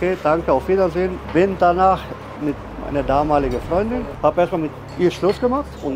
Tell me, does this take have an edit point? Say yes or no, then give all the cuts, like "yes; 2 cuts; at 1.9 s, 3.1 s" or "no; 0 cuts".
yes; 2 cuts; at 2.3 s, 4.2 s